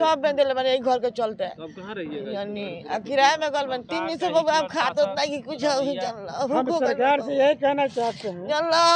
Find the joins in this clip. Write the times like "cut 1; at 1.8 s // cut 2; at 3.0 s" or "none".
none

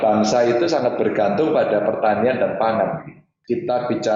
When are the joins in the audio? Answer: cut 1; at 3.3 s

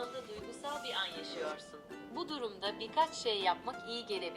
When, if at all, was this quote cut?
none

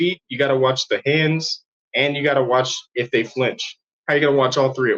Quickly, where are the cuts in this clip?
none

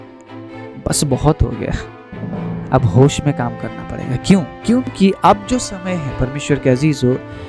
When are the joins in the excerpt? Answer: cut 1; at 4.9 s

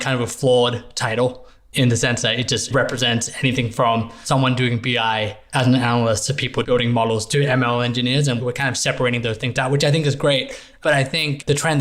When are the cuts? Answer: cut 1; at 4.2 s // cut 2; at 5.4 s

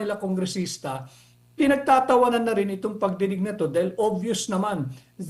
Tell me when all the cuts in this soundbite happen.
none

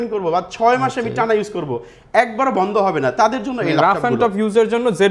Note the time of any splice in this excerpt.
none

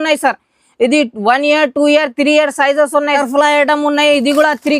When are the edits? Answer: cut 1; at 3.2 s

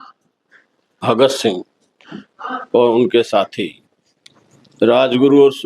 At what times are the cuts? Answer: none

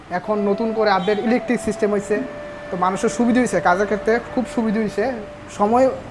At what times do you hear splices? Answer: none

